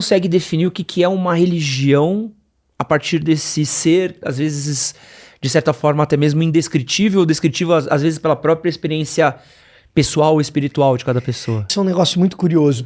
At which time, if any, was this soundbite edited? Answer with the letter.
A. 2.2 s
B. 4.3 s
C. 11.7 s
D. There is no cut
C